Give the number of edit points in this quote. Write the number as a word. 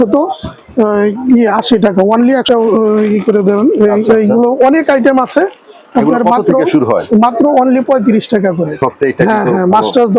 two